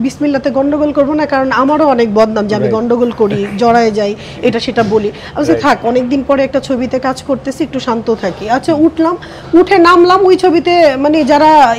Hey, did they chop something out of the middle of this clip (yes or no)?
no